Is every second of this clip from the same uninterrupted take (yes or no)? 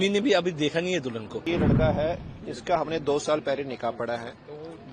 no